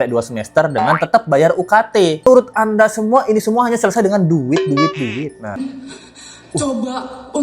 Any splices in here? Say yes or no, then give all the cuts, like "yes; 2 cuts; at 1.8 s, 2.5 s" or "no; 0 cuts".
yes; 2 cuts; at 2.2 s, 5.6 s